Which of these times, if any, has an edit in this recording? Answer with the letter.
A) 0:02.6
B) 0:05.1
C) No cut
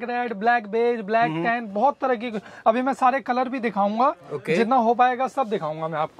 C